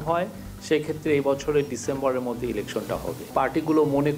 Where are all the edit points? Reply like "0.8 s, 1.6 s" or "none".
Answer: 3.3 s